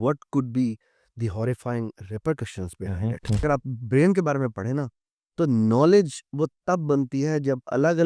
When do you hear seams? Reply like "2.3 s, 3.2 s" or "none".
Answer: 3.4 s